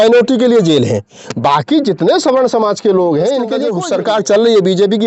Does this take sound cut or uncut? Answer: cut